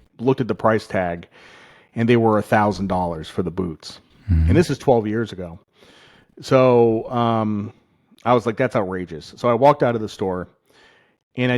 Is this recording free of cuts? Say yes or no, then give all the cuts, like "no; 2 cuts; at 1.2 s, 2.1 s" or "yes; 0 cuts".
yes; 0 cuts